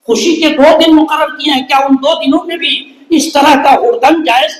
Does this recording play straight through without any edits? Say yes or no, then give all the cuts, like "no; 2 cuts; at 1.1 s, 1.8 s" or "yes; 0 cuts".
yes; 0 cuts